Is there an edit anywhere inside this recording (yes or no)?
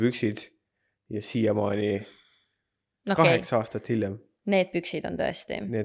no